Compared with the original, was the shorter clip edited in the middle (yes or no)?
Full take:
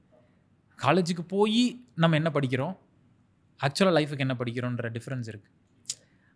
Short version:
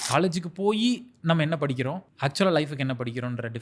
yes